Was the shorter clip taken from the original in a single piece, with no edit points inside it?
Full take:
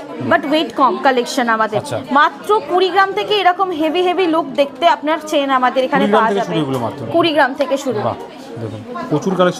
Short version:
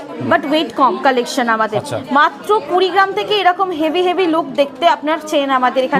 yes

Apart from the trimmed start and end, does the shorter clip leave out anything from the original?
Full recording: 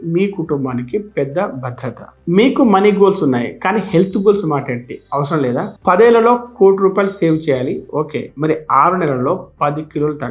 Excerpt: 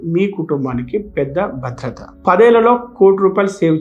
yes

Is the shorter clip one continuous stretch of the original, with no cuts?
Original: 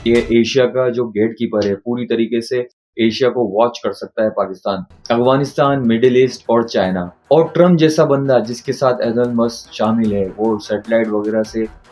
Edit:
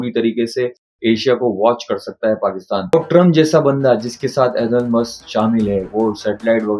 no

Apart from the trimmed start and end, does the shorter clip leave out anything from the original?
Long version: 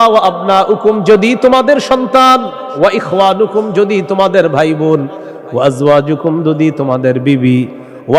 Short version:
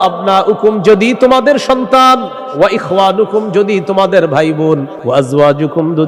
yes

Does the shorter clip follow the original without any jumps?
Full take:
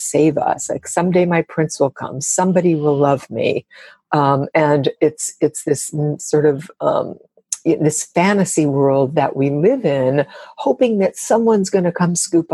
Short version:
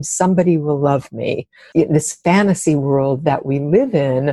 no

